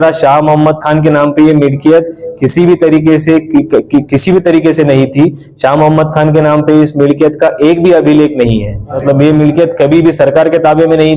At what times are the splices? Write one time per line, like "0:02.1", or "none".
0:09.0